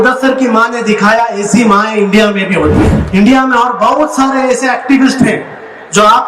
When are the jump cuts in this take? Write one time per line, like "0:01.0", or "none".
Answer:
0:03.0